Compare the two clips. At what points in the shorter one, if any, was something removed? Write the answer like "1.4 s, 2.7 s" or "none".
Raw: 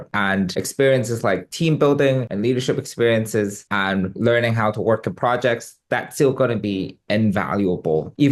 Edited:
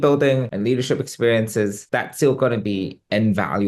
1.8 s